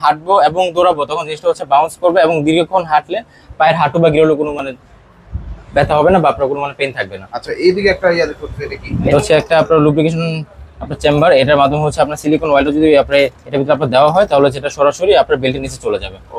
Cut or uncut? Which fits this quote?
uncut